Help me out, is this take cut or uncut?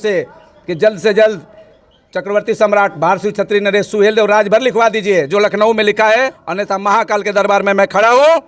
cut